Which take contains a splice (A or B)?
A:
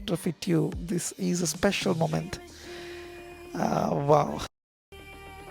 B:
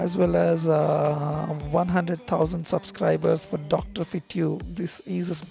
A